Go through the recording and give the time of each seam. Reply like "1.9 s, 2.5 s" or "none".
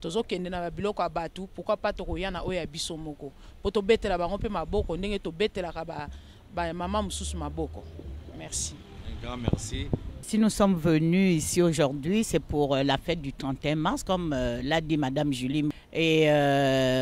10.2 s, 15.8 s